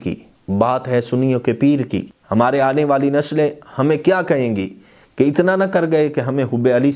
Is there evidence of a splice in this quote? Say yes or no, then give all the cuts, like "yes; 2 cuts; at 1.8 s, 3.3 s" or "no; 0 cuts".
yes; 1 cut; at 2.1 s